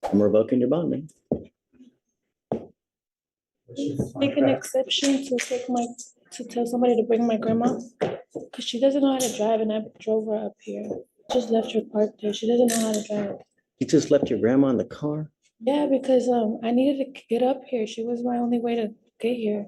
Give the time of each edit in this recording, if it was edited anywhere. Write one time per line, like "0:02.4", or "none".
0:11.3